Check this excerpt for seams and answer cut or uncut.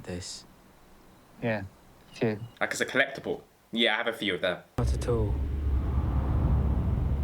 cut